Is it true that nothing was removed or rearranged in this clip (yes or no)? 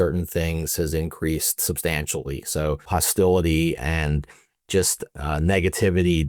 no